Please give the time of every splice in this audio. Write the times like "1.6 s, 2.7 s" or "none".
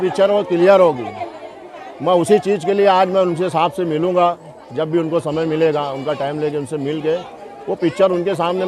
none